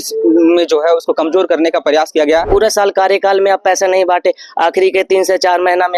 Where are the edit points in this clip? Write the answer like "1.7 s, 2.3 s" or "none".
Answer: 2.5 s